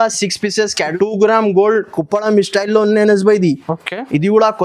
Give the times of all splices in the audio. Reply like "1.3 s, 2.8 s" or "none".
0.9 s